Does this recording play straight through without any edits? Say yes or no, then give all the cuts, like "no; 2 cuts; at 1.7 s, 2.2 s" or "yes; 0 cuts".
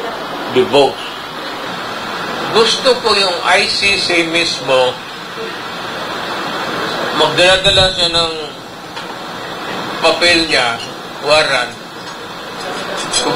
no; 1 cut; at 1.6 s